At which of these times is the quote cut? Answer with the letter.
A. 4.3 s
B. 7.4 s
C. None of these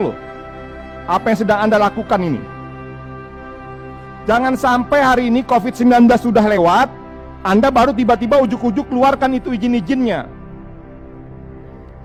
C